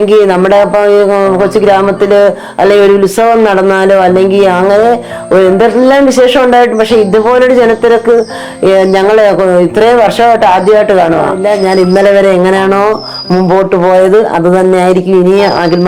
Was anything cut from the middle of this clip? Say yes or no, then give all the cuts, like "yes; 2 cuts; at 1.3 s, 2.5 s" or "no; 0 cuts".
yes; 1 cut; at 11.4 s